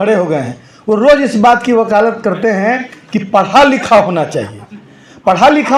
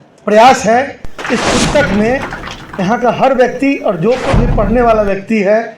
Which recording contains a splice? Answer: second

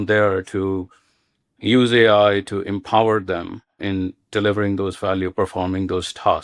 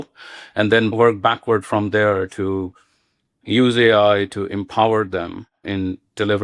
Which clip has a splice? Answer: second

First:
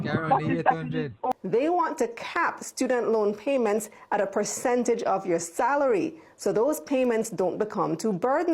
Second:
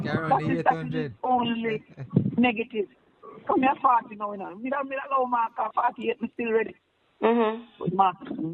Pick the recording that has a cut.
first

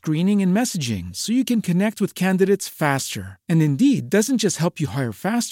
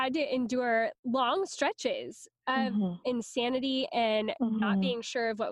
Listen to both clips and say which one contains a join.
second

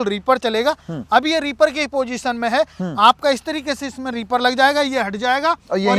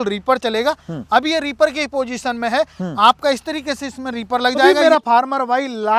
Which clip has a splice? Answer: second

